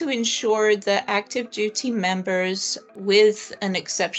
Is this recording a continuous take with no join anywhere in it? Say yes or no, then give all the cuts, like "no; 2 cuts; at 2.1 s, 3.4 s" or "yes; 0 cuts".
no; 1 cut; at 2.9 s